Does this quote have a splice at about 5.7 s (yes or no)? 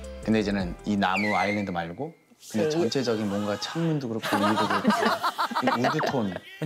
no